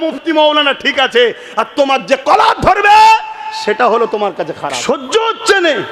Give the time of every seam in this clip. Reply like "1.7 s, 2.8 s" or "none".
4.6 s